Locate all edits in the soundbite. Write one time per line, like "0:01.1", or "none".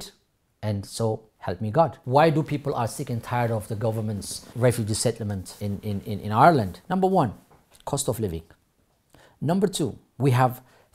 0:02.0
0:04.4
0:05.5
0:06.8